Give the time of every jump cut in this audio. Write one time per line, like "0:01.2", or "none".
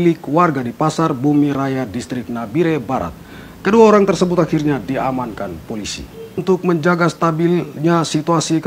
0:06.4